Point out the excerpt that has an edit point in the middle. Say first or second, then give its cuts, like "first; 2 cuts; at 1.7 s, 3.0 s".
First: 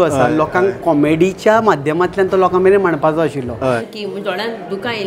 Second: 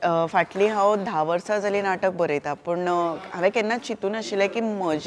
first; 1 cut; at 3.9 s